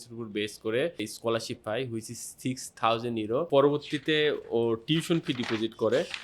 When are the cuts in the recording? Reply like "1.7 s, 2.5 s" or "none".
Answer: 1.0 s, 3.5 s